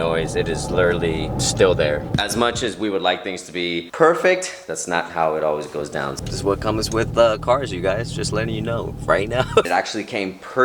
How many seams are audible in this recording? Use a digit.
4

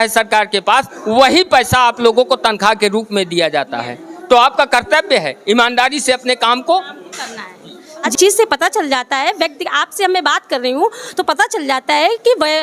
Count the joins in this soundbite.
1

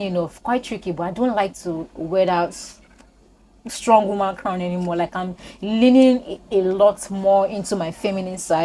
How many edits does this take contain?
0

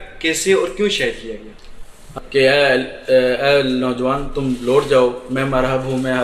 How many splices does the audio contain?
1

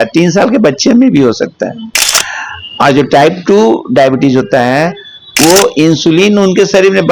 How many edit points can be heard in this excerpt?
0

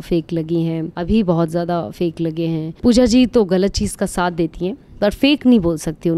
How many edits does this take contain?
2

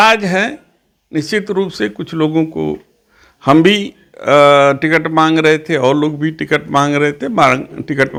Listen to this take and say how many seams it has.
0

